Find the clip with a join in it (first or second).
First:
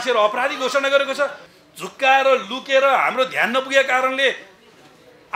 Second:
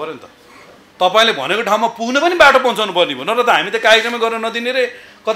first